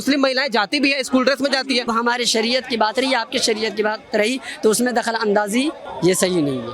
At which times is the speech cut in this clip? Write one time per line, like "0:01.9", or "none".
0:01.9
0:05.9